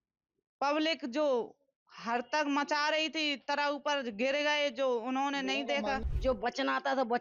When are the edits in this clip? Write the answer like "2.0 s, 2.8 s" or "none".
6.0 s